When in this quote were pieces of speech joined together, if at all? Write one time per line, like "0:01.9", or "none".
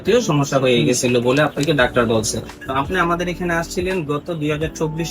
0:02.6

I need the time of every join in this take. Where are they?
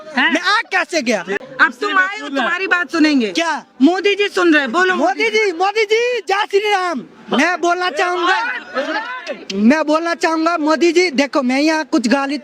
0:01.4

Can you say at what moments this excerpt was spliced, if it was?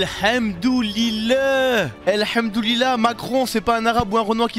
none

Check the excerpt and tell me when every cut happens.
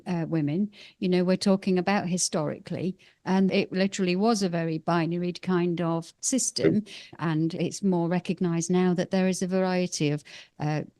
0:03.5
0:07.2

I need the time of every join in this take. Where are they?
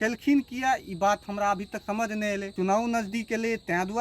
0:02.5

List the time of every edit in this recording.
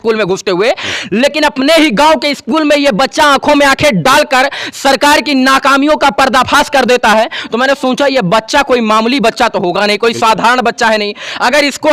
none

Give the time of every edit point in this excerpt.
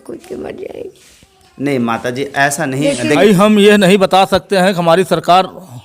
0:03.2

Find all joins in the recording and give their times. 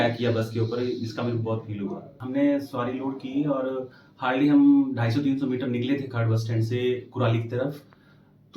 0:02.1

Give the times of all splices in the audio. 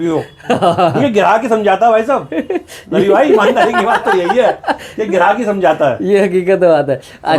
none

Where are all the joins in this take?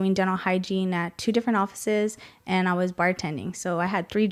none

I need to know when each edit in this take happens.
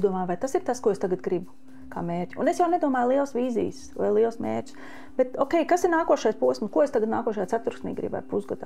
none

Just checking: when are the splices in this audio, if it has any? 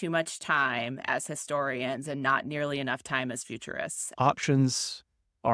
0:04.0

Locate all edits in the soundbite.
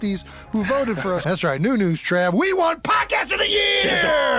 0:01.2

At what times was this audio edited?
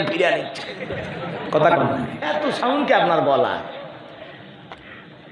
0:02.2

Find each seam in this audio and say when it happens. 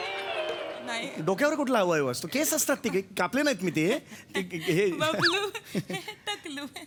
none

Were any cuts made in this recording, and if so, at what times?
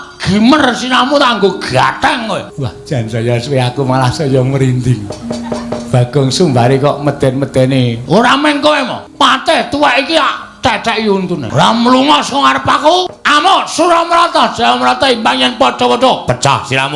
0:02.5
0:09.0
0:11.5
0:13.2

